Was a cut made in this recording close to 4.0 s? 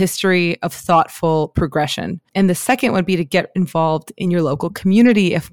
no; 1 cut; at 2.2 s

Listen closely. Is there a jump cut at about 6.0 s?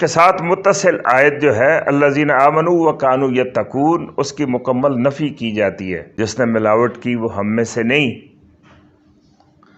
yes; 1 cut; at 6.0 s

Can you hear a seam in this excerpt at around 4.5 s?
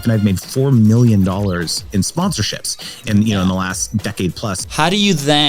yes; 2 cuts; at 2.1 s, 4.5 s

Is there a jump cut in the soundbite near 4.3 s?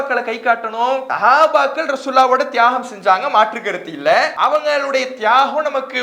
yes; 2 cuts; at 1.1 s, 4.3 s

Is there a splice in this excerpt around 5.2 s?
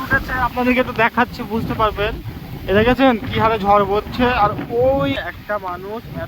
yes; 1 cut; at 5.2 s

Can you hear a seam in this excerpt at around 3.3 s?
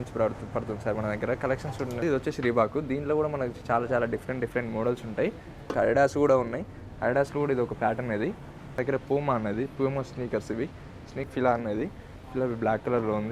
no; 4 cuts; at 2.0 s, 5.7 s, 8.8 s, 11.3 s

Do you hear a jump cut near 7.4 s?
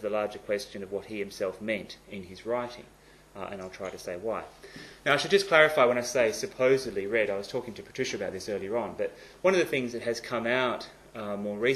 yes; 1 cut; at 7.4 s

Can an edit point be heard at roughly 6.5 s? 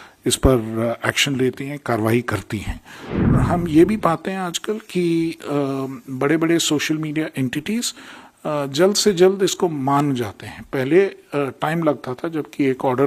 no; 1 cut; at 3.3 s

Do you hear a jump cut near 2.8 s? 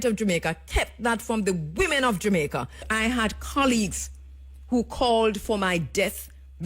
yes; 1 cut; at 2.8 s

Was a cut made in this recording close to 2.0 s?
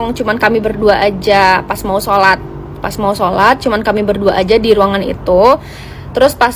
no; 0 cuts

